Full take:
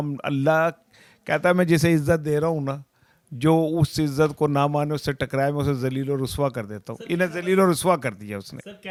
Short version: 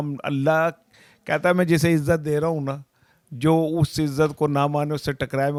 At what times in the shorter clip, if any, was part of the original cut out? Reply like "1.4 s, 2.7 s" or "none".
none